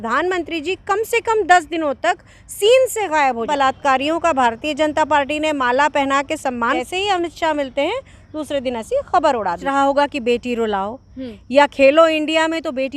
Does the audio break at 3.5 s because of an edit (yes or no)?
yes